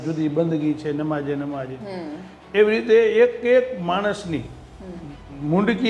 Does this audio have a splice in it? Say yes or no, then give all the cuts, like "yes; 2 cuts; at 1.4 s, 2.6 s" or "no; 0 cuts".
no; 0 cuts